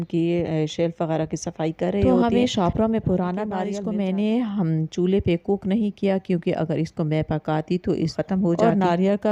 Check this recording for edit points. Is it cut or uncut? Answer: cut